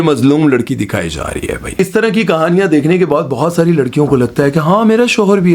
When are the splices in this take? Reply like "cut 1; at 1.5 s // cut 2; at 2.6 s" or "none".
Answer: cut 1; at 1.8 s